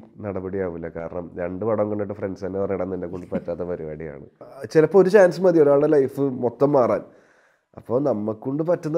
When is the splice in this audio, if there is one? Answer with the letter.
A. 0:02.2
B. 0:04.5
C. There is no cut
B